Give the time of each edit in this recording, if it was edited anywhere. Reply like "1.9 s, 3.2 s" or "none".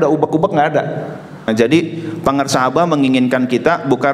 1.5 s